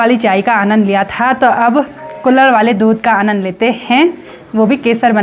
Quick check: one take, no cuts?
yes; 0 cuts

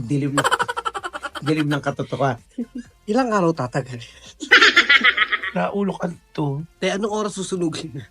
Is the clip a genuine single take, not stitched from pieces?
no; 1 cut; at 6.7 s

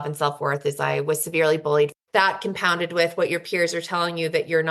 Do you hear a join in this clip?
yes; 1 cut; at 1.9 s

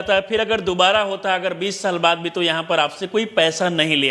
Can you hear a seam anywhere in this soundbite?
no; 0 cuts

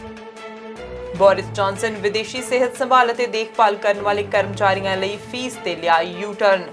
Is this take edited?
yes; 1 cut; at 1.1 s

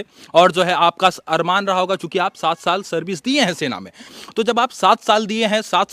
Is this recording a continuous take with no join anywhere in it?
yes; 0 cuts

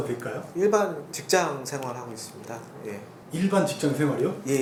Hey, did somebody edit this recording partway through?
no; 0 cuts

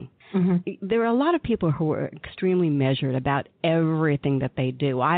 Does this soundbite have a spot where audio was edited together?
no; 0 cuts

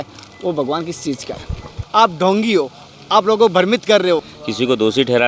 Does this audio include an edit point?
yes; 2 cuts; at 1.8 s, 4.4 s

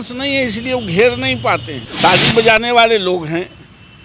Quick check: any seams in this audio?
yes; 1 cut; at 1.8 s

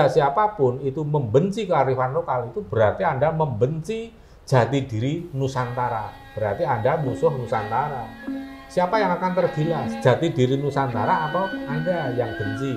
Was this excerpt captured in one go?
yes; 0 cuts

